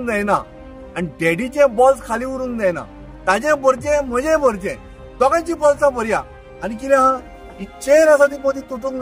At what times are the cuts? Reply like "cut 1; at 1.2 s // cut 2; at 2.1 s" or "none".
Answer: none